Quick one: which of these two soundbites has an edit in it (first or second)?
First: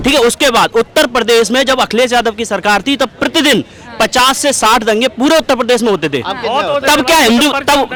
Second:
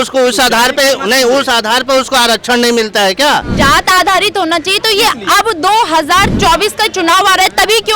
second